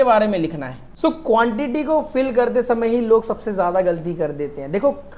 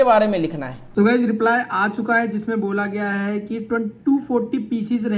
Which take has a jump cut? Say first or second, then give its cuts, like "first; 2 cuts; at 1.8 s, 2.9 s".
second; 1 cut; at 0.9 s